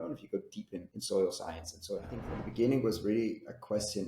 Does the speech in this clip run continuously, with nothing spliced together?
no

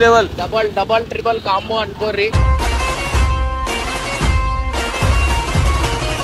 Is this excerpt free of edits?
yes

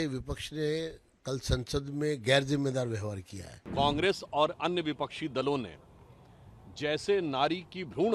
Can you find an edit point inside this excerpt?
yes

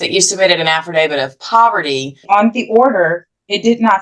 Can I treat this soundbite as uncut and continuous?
no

